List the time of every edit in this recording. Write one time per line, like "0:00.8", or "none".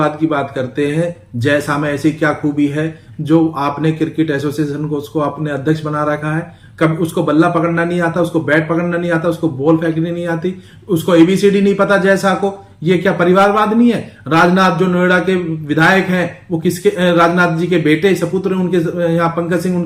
none